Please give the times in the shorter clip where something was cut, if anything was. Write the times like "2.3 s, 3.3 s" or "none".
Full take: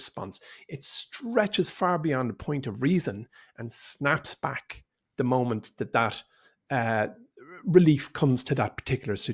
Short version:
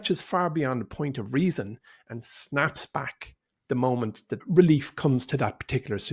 4.3 s

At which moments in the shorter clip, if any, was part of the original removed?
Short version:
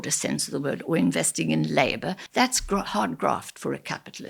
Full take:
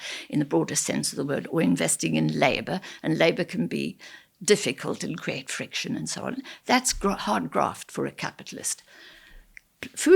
2.2 s

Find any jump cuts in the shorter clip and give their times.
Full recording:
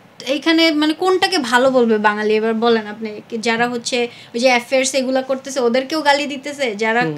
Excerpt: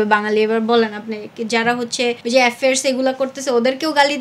2.2 s

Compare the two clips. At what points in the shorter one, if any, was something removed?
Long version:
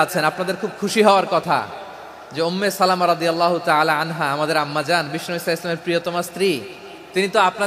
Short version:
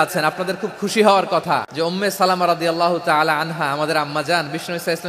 1.7 s

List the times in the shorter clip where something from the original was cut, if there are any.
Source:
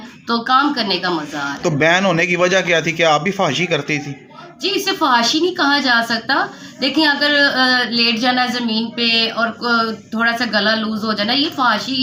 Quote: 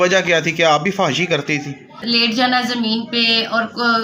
2.0 s

